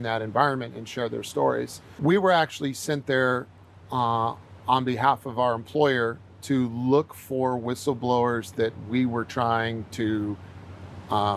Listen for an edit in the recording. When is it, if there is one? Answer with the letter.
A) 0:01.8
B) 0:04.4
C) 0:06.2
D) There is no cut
A